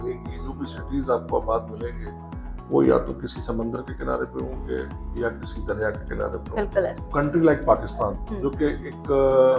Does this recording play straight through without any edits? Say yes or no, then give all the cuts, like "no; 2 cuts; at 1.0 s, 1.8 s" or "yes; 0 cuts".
no; 1 cut; at 7.0 s